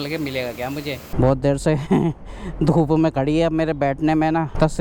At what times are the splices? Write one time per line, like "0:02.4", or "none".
0:01.0